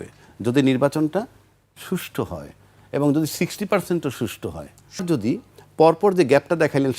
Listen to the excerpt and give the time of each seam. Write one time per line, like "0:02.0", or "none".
0:05.0